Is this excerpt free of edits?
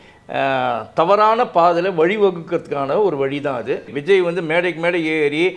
no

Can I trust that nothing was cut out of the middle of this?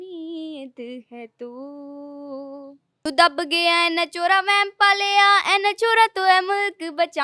no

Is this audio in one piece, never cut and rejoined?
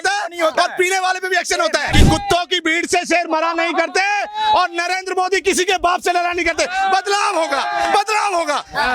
no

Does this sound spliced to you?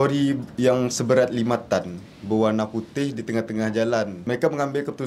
yes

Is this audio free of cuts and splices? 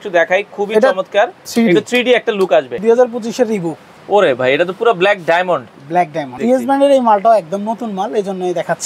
no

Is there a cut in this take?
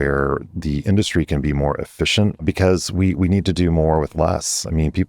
yes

